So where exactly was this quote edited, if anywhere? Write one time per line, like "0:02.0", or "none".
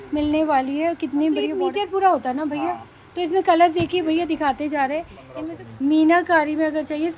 0:01.6
0:05.2